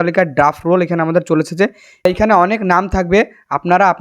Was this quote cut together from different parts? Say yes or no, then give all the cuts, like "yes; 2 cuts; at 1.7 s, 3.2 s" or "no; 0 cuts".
yes; 1 cut; at 2.0 s